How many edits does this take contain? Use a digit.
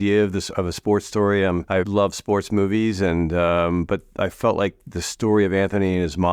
1